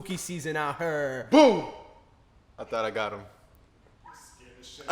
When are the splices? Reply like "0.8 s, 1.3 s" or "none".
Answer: none